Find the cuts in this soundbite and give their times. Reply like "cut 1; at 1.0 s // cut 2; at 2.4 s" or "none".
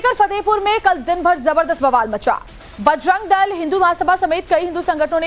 cut 1; at 1.0 s